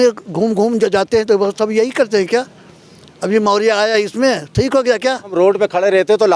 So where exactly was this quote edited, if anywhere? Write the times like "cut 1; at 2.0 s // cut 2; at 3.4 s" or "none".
cut 1; at 5.3 s